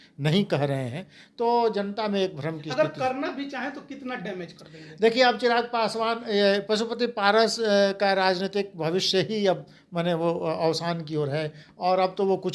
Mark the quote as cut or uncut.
uncut